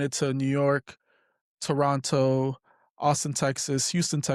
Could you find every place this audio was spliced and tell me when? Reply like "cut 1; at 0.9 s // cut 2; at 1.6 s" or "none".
none